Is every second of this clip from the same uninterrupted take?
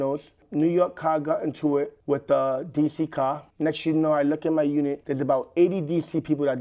no; 3 cuts; at 2.0 s, 3.5 s, 5.0 s

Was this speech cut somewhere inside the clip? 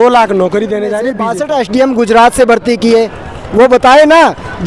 yes; 1 cut; at 1.2 s

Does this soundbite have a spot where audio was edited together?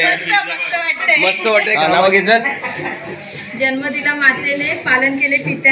yes; 1 cut; at 1.7 s

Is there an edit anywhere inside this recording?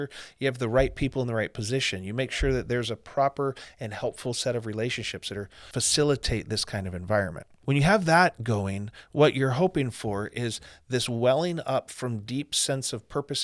yes; 2 cuts; at 5.6 s, 7.5 s

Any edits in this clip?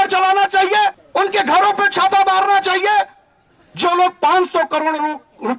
yes; 1 cut; at 1.0 s

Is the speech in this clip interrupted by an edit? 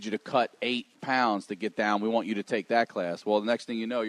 yes; 1 cut; at 0.9 s

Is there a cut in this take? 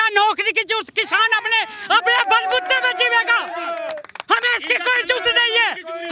no; 0 cuts

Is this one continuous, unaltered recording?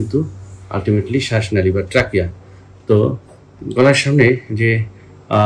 yes; 0 cuts

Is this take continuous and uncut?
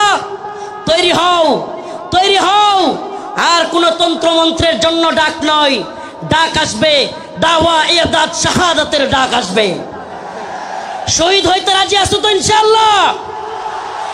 yes; 0 cuts

